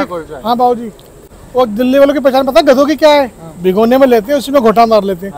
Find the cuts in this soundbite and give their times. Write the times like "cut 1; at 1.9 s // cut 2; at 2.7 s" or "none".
cut 1; at 1.3 s